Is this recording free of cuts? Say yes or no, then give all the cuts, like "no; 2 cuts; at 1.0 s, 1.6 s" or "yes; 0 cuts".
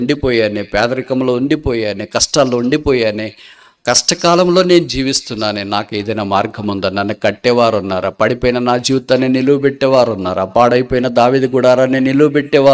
yes; 0 cuts